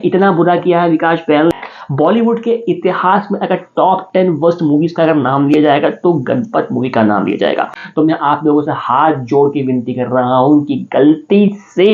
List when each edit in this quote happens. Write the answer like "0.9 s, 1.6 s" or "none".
1.5 s, 7.8 s